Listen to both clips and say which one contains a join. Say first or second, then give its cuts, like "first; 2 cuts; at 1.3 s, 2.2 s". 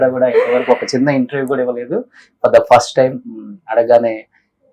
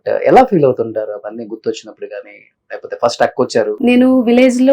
second; 1 cut; at 3.7 s